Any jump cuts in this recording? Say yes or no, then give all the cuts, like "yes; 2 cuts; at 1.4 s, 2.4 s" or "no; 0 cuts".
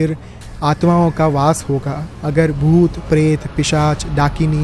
yes; 1 cut; at 2.2 s